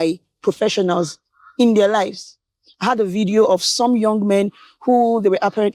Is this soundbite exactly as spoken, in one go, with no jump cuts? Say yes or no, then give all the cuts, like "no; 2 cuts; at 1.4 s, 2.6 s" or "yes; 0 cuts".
yes; 0 cuts